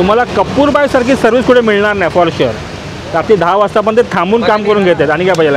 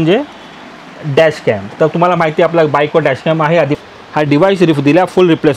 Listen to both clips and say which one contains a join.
second; 1 cut; at 3.7 s

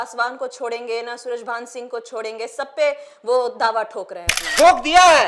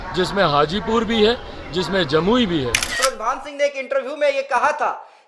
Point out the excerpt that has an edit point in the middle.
second; 1 cut; at 2.9 s

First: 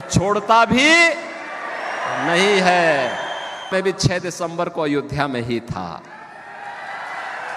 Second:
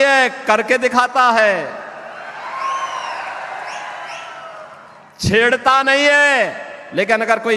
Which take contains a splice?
first; 1 cut; at 3.7 s

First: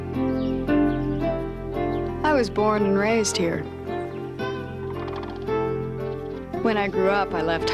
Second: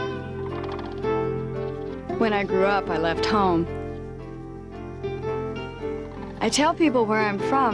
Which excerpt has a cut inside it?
second; 1 cut; at 6.0 s

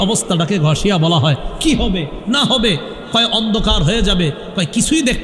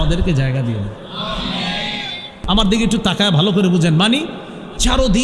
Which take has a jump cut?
second; 1 cut; at 2.3 s

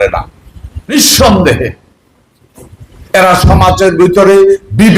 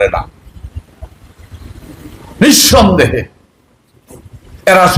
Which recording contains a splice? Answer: first; 1 cut; at 0.9 s

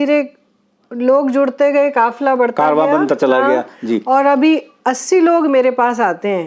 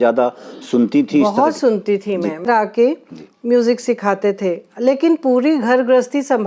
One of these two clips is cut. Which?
second; 1 cut; at 2.5 s

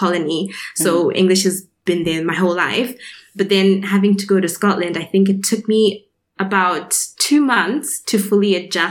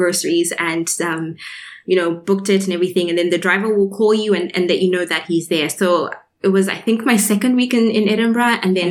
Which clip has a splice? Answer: first; 1 cut; at 1.7 s

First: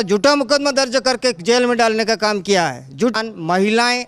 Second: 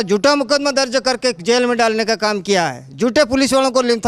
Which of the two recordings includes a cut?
first; 1 cut; at 3.1 s

